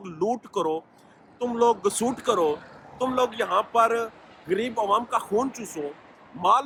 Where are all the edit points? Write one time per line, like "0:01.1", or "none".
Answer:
none